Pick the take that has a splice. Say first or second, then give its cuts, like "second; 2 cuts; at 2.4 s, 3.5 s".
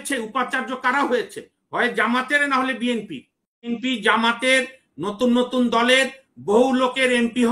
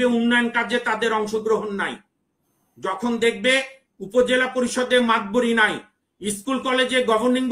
first; 1 cut; at 3.8 s